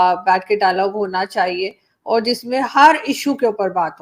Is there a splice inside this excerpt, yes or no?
no